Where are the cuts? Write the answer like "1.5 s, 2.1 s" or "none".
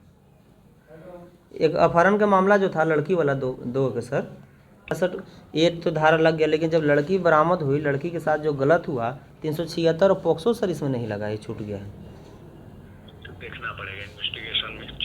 4.9 s

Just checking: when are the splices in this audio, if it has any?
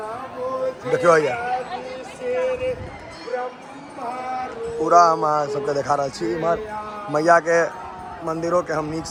none

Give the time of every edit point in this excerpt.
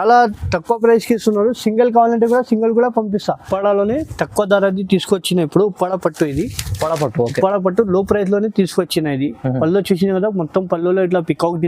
3.5 s

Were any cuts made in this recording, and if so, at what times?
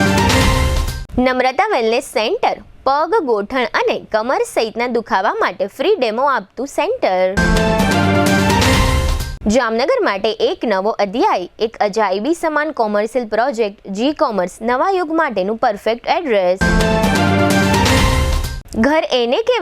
0.9 s

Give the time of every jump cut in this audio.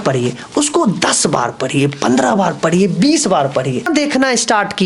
3.9 s

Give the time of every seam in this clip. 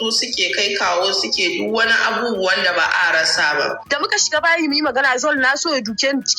3.8 s

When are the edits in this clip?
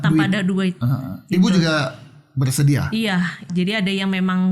3.5 s

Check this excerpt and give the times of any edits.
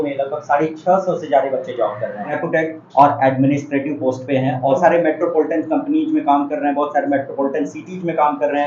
2.4 s, 4.8 s

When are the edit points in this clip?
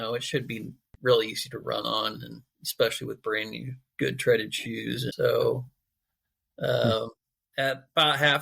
5.1 s

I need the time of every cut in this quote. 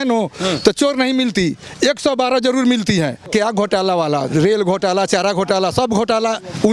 3.3 s

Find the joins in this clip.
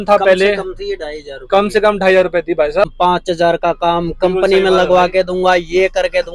2.9 s

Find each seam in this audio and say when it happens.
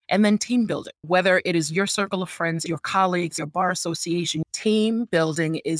1.0 s, 2.6 s, 3.3 s

